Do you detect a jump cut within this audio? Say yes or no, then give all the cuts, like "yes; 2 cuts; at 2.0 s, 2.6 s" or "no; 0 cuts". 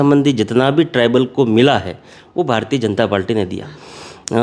no; 0 cuts